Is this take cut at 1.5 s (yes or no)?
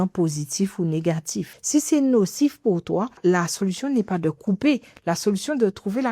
yes